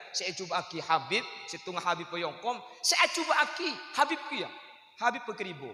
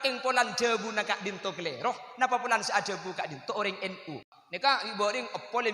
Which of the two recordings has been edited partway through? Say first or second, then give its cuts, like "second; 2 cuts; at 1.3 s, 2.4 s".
second; 1 cut; at 4.2 s